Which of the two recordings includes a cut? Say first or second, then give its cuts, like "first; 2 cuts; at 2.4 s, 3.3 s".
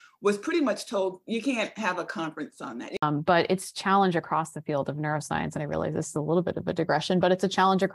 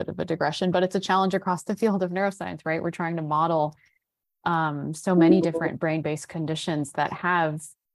first; 1 cut; at 3.0 s